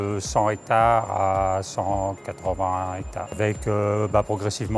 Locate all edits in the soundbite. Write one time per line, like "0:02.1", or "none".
0:03.4